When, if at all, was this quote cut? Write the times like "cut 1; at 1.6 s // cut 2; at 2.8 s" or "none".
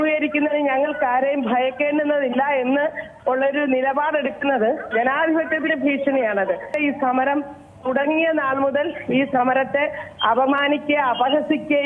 cut 1; at 6.7 s